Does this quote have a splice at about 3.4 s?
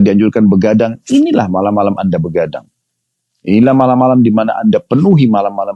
no; 0 cuts

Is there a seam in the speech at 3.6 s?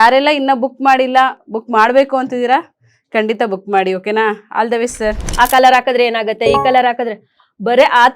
no; 1 cut; at 5.2 s

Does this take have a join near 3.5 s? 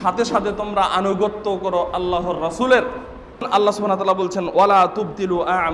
yes; 1 cut; at 3.5 s

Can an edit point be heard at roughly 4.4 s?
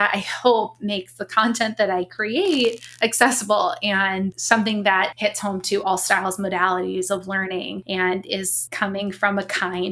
yes; 4 cuts; at 4.4 s, 5.1 s, 7.8 s, 8.6 s

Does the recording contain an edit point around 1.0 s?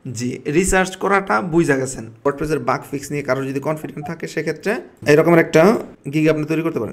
no; 3 cuts; at 2.3 s, 5.0 s, 6.0 s

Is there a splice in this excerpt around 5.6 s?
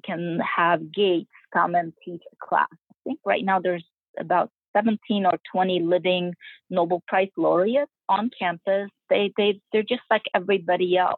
no; 3 cuts; at 2.8 s, 8.0 s, 9.0 s

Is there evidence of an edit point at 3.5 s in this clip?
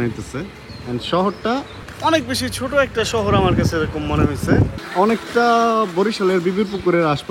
no; 1 cut; at 4.8 s

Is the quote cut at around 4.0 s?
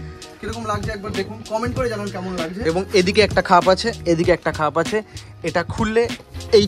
no; 1 cut; at 2.6 s

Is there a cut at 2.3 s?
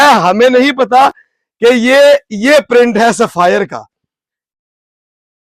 no; 0 cuts

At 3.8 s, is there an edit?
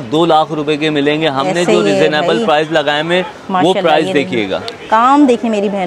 no; 0 cuts

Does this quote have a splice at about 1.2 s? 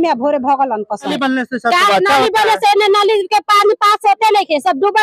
yes; 1 cut; at 1.2 s

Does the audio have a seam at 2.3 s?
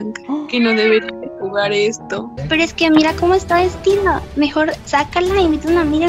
yes; 1 cut; at 2.3 s

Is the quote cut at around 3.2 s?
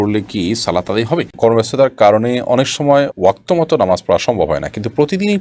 no; 1 cut; at 1.3 s

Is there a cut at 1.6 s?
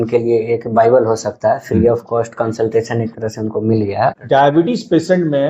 no; 1 cut; at 4.1 s

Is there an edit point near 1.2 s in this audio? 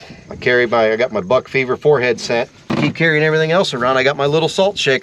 no; 1 cut; at 2.6 s

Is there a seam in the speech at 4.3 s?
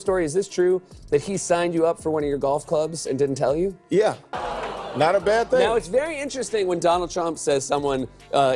yes; 1 cut; at 4.3 s

